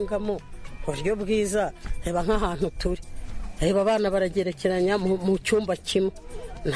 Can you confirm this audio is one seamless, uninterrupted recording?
yes; 0 cuts

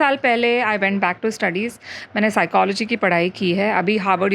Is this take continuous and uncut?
yes; 0 cuts

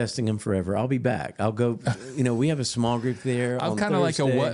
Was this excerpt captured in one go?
yes; 0 cuts

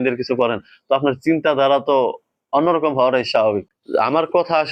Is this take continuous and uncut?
no; 1 cut; at 3.7 s

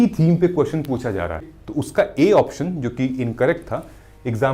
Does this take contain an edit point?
yes; 1 cut; at 1.5 s

